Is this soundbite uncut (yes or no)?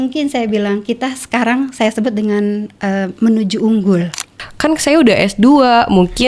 no